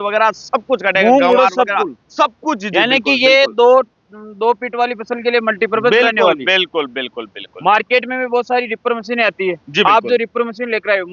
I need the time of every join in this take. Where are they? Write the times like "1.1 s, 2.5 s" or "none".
none